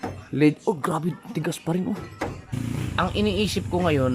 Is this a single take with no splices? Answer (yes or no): no